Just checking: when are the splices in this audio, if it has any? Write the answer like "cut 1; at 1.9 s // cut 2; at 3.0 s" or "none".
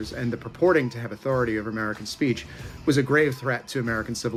none